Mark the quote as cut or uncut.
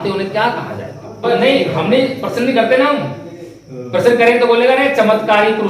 cut